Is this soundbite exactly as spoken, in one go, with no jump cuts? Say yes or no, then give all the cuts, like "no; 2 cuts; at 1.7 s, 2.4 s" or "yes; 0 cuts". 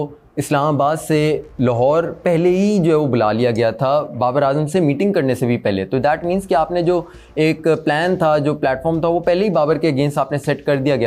yes; 0 cuts